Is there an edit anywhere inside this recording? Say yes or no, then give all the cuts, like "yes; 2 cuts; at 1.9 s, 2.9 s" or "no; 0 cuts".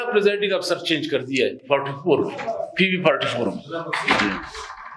no; 0 cuts